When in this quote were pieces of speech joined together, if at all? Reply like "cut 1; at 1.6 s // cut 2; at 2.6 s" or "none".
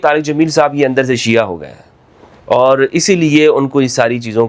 none